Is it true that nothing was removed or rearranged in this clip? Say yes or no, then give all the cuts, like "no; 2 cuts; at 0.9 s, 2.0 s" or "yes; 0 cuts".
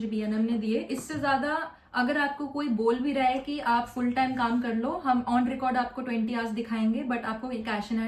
yes; 0 cuts